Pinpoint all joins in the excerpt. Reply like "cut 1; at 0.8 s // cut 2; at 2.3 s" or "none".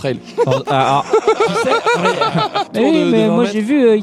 cut 1; at 2.7 s